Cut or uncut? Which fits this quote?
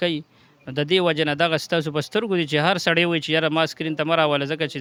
uncut